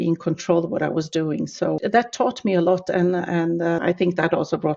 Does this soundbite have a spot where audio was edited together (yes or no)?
yes